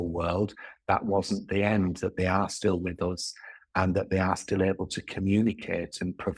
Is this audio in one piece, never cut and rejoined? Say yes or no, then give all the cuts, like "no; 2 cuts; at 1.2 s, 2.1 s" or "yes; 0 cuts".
yes; 0 cuts